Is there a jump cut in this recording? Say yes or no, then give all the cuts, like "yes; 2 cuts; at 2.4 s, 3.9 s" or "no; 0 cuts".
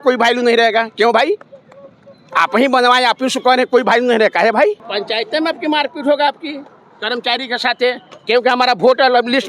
yes; 1 cut; at 4.9 s